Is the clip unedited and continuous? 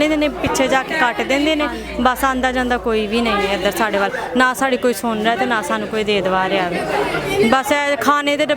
yes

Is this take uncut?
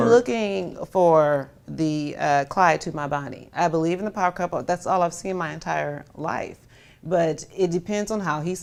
yes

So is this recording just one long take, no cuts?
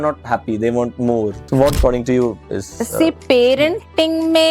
no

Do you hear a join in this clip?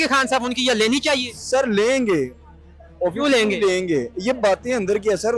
no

